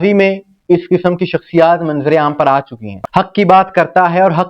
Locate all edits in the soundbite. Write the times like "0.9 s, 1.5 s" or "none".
3.0 s